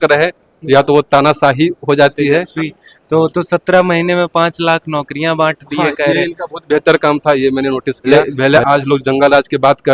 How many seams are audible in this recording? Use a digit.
2